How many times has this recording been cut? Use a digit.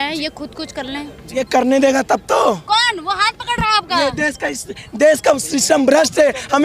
1